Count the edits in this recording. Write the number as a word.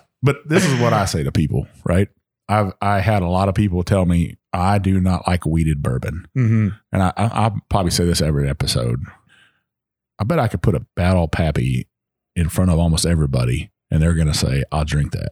two